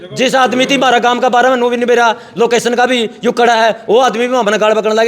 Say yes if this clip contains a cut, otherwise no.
no